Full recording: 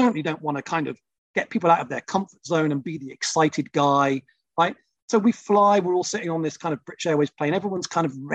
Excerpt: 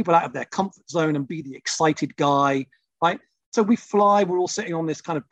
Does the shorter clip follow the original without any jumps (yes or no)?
yes